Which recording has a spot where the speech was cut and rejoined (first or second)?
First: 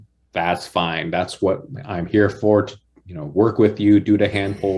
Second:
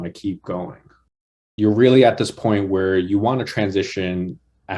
second